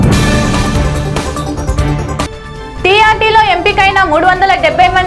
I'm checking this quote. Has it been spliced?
yes; 1 cut; at 2.0 s

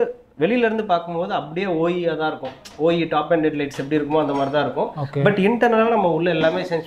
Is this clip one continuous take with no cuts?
yes; 0 cuts

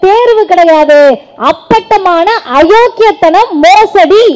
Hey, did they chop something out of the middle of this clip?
no; 0 cuts

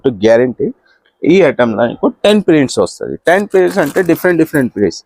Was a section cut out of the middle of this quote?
no; 0 cuts

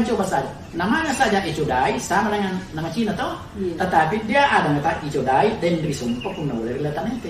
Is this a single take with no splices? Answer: yes; 0 cuts

